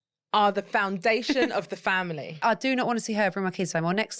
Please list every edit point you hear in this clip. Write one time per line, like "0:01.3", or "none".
0:02.4